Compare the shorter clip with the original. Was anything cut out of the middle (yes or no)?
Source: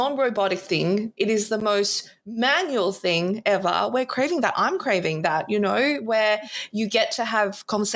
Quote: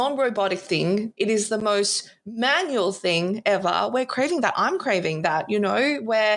no